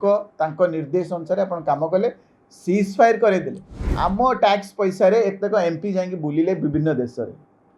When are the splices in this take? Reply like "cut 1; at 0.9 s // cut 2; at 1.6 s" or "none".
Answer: cut 1; at 3.9 s